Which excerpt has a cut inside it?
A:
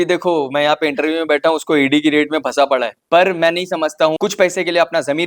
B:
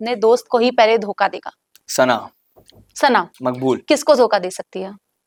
A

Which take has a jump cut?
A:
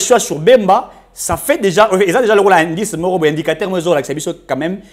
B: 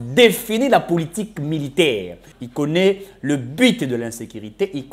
B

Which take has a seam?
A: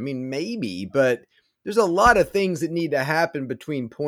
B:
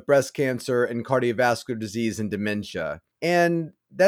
B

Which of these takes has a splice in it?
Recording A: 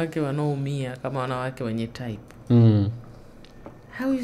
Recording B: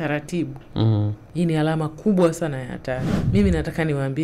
B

